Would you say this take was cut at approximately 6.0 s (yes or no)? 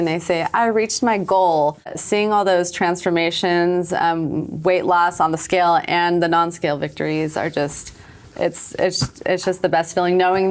no